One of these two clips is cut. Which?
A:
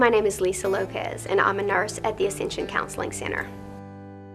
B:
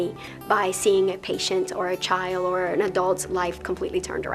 A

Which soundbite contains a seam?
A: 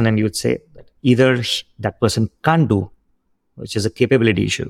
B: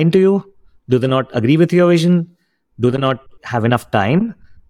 B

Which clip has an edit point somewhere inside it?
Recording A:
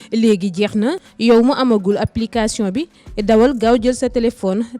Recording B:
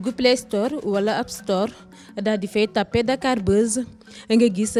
A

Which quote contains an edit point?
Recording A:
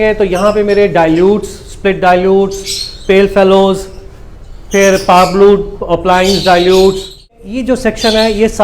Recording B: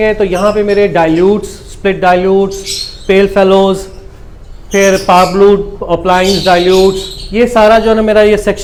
A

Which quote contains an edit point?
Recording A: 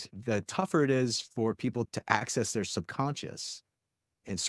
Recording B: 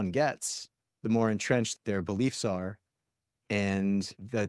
A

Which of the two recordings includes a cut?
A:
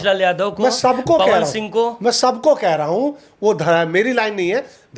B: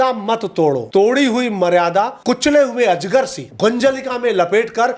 B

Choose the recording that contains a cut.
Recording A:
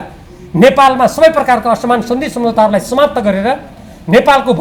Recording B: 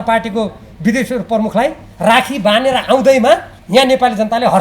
B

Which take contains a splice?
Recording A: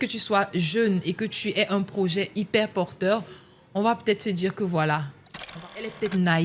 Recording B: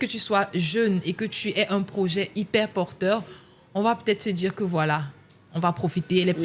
A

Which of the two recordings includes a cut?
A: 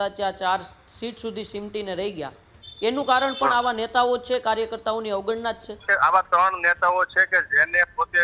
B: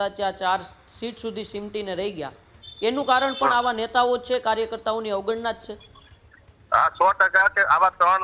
A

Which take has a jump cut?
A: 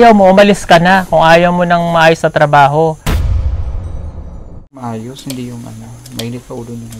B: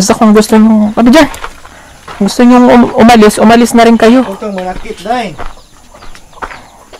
A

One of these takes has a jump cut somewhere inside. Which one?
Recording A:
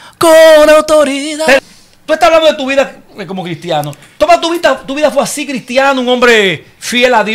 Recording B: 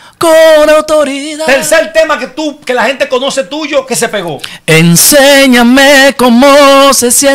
A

